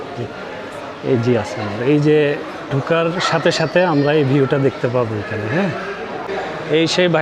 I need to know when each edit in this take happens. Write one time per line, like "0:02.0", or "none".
0:06.3